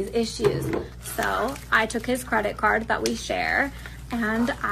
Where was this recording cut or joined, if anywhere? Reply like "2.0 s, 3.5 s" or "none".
2.2 s